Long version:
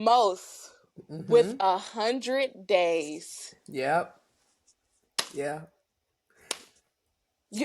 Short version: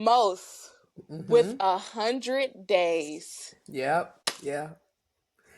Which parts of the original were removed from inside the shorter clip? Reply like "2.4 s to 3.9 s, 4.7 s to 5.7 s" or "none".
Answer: 4.2 s to 5.1 s